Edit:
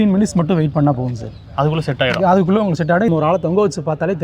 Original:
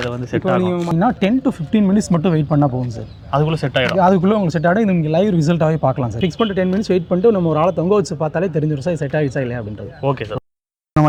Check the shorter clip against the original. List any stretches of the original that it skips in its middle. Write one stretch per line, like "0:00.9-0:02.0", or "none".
0:04.8-0:07.4